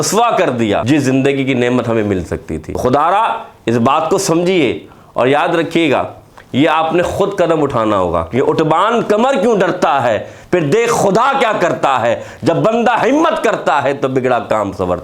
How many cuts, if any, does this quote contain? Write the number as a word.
two